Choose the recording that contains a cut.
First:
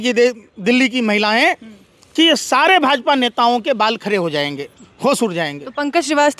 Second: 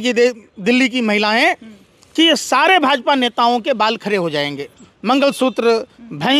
second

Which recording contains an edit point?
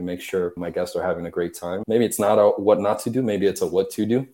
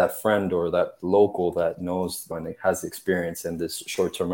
first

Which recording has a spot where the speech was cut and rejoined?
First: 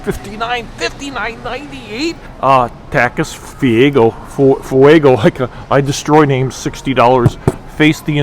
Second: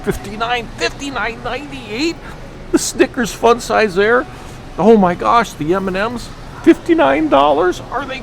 first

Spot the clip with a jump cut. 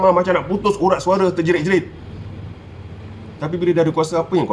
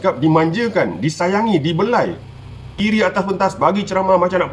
second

